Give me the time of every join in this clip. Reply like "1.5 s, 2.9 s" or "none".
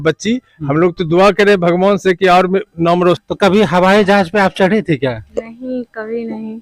3.2 s

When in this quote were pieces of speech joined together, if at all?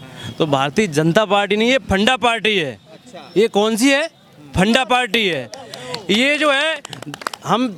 none

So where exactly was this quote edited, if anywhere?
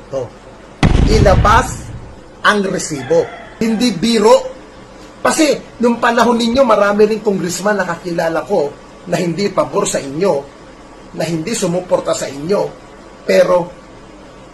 3.6 s

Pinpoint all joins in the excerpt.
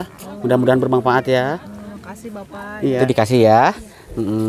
3.0 s

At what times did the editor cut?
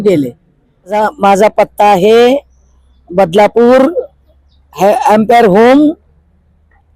0.9 s

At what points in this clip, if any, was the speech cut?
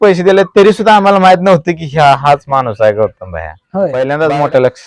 3.9 s

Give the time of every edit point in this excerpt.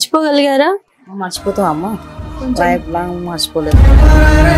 none

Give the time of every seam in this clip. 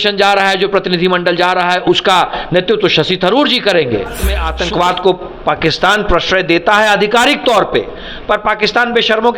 4.5 s

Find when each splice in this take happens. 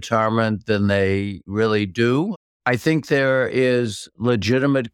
1.4 s, 2.4 s

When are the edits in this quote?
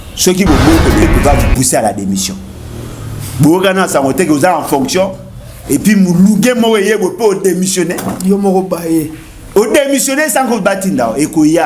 1.0 s

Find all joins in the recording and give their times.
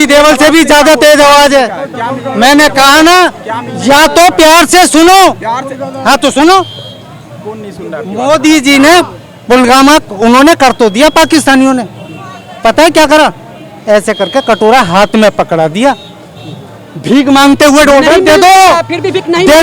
none

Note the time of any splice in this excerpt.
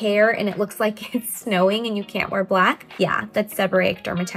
none

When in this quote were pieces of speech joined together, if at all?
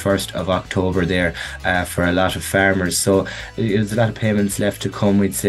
3.5 s

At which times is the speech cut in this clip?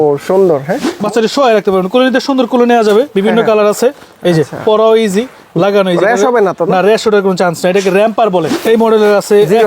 0.9 s, 8.6 s

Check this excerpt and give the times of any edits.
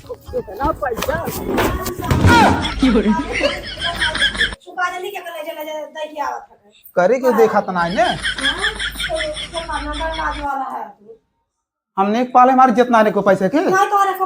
1.4 s

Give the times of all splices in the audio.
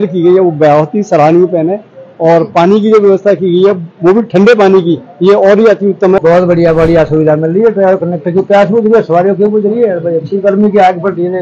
6.2 s

